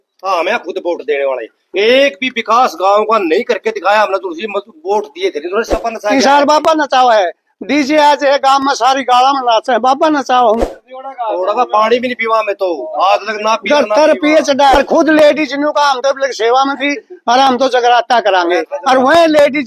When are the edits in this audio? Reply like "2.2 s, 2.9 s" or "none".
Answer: 5.7 s, 10.7 s, 14.7 s